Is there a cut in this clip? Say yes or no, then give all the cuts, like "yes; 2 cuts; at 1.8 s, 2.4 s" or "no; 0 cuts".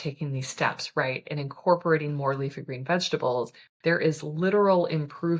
no; 0 cuts